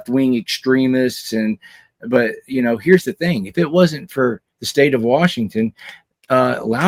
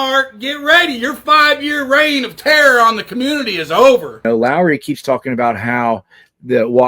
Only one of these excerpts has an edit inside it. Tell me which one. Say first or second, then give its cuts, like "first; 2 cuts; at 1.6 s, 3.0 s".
second; 1 cut; at 4.2 s